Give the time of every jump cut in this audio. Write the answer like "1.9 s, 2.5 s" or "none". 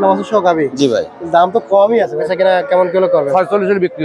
2.2 s